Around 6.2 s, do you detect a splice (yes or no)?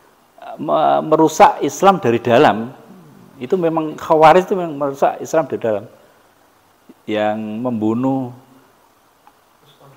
no